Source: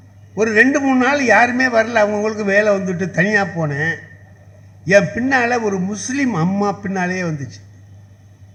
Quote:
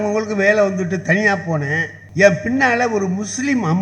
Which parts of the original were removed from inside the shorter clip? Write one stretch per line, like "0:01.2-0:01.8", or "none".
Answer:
0:04.0-0:04.7